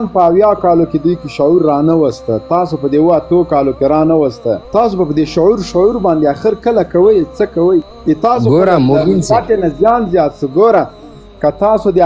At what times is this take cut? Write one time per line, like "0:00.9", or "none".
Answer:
0:04.6
0:07.9